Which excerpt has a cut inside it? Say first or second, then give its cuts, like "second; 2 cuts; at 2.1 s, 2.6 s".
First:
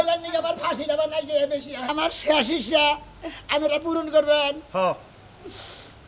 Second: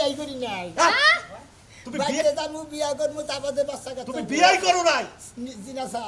first; 1 cut; at 1.8 s